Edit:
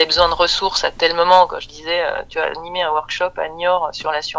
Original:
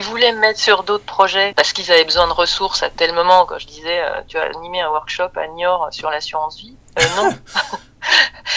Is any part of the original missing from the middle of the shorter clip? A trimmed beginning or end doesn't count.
no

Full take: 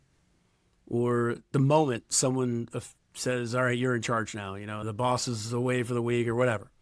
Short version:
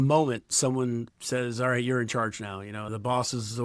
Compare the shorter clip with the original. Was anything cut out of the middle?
yes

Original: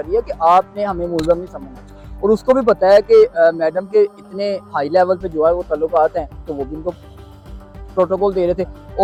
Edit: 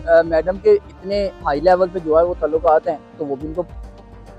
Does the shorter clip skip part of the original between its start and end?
no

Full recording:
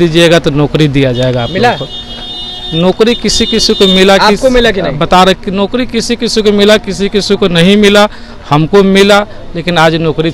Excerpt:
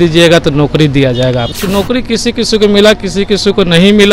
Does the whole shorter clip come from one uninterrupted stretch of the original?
no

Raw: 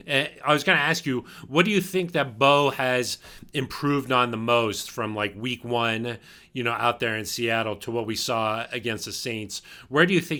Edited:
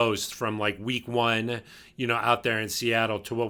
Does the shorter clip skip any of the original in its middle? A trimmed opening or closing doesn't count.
no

